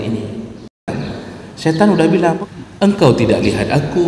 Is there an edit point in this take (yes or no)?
yes